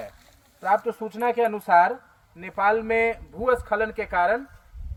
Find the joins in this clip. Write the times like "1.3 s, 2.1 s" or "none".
none